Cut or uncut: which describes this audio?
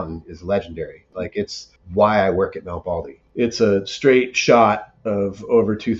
cut